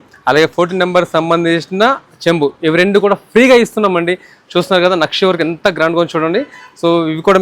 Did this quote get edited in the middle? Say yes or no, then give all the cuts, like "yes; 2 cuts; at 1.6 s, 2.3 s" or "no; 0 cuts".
no; 0 cuts